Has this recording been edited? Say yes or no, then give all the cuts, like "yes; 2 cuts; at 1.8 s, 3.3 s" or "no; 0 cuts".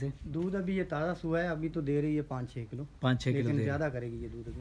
no; 0 cuts